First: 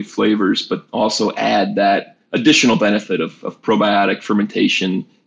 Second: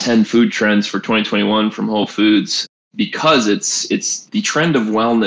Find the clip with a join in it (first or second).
second